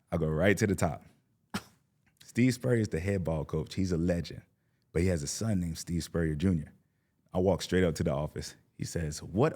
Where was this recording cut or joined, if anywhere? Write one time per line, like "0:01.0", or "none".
0:02.2

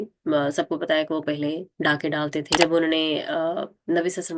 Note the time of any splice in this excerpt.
0:02.5

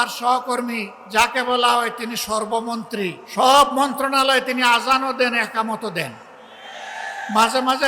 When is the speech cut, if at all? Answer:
0:00.9
0:03.2

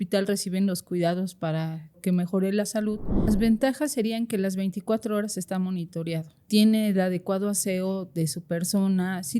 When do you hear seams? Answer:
0:02.0
0:03.3
0:06.5

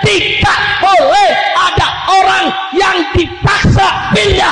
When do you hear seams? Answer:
none

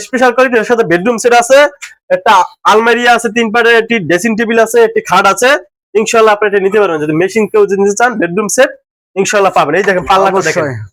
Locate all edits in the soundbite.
none

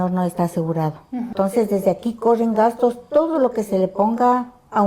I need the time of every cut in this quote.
0:01.3

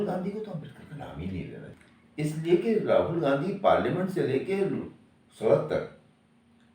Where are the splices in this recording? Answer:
0:01.7

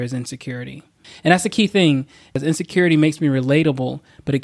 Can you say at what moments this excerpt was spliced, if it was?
0:01.1
0:02.4

